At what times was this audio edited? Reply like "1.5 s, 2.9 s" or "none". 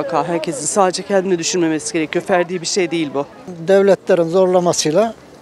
3.5 s